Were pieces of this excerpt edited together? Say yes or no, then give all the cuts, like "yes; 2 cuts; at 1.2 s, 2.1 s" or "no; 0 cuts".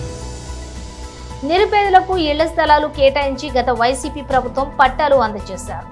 yes; 1 cut; at 0.9 s